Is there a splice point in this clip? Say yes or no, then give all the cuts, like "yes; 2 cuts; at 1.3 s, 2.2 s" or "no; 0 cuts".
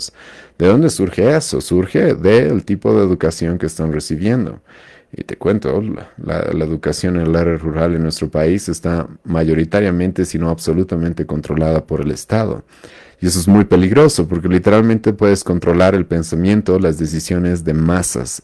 no; 0 cuts